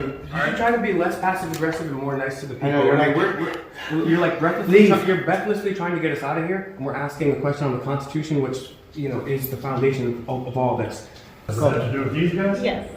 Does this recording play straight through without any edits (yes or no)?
no